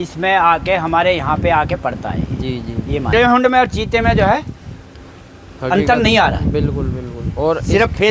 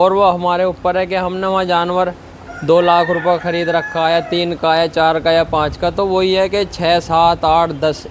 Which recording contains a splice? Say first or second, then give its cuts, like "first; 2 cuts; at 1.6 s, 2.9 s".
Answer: first; 1 cut; at 3.1 s